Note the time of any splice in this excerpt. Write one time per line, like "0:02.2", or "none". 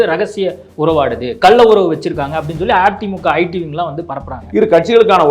0:04.4